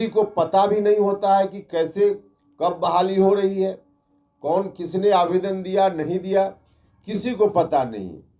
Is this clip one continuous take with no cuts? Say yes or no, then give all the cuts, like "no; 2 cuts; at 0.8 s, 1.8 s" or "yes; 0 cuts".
yes; 0 cuts